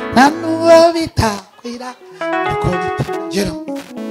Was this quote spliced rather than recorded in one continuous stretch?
yes; 1 cut; at 3.1 s

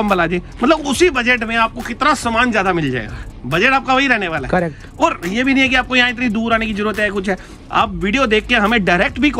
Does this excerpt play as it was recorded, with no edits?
yes; 0 cuts

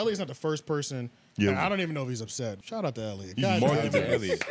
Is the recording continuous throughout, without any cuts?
no; 1 cut; at 2.6 s

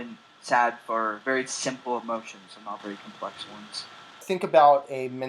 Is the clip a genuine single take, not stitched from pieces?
no; 2 cuts; at 1.2 s, 4.2 s

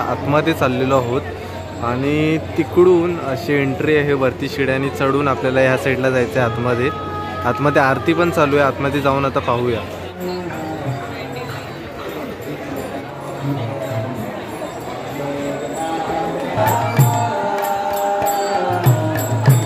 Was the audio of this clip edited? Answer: no; 0 cuts

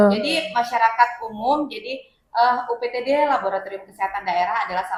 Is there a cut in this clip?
no; 0 cuts

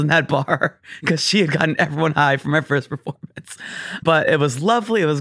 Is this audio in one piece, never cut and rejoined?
no; 1 cut; at 4.0 s

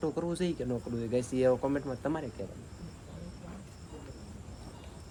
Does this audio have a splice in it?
no; 0 cuts

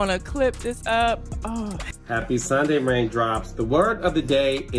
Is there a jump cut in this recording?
yes; 1 cut; at 1.9 s

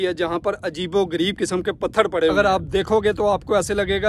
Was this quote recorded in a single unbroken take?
no; 1 cut; at 2.3 s

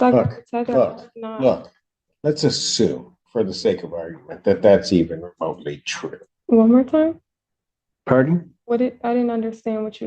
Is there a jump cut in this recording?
yes; 1 cut; at 6.3 s

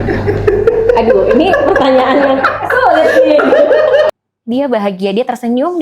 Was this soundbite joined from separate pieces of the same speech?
yes; 1 cut; at 4.1 s

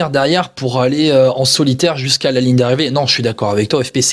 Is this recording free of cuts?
yes; 0 cuts

